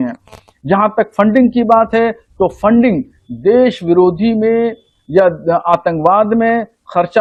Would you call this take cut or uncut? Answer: uncut